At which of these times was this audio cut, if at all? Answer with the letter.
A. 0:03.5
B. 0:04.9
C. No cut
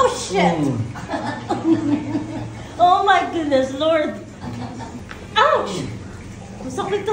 B